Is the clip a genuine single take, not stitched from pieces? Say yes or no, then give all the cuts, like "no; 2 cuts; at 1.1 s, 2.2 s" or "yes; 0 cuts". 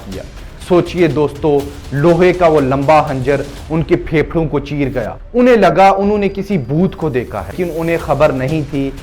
no; 2 cuts; at 5.1 s, 7.6 s